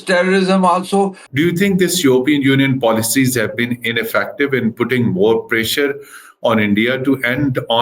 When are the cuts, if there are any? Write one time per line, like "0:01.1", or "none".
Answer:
0:01.2